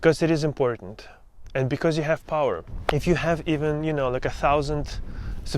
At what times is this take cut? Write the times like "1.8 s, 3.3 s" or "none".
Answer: 2.7 s